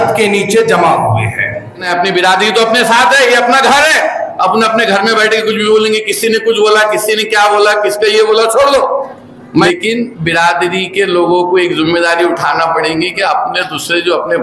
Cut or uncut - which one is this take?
cut